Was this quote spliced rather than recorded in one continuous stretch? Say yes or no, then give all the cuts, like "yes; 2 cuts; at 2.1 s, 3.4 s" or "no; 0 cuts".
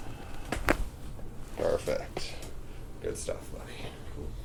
no; 0 cuts